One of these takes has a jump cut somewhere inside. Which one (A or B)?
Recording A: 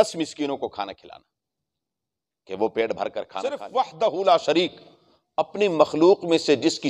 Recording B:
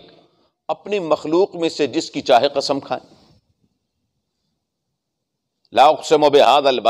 A